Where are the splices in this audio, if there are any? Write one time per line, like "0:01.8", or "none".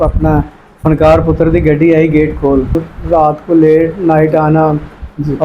0:02.8